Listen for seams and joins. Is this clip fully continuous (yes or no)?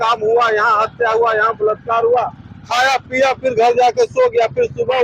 yes